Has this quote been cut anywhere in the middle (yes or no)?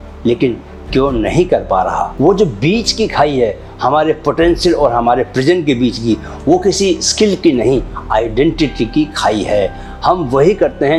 no